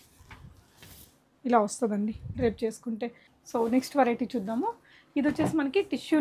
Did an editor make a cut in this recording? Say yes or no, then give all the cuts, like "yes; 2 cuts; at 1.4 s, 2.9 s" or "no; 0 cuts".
no; 0 cuts